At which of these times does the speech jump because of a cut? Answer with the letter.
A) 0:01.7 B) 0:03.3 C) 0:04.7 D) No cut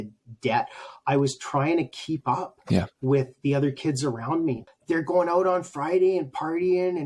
C